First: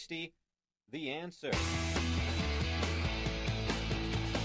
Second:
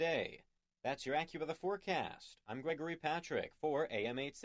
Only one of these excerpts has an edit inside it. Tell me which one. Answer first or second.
first